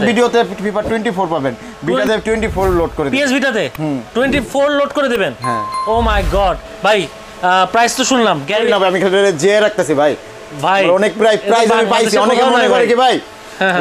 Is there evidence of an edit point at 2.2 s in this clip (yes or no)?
no